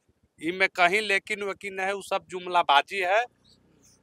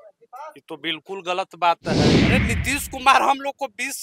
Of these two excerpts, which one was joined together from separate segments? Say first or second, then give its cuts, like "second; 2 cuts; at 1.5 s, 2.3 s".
second; 1 cut; at 2.3 s